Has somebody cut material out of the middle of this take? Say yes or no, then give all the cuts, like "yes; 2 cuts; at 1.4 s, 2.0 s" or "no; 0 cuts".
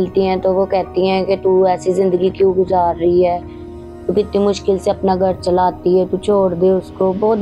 no; 0 cuts